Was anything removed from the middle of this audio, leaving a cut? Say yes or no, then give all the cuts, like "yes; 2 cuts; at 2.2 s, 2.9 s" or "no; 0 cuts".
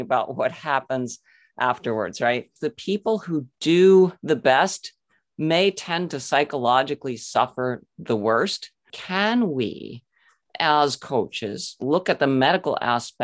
yes; 3 cuts; at 2.7 s, 4.2 s, 9.0 s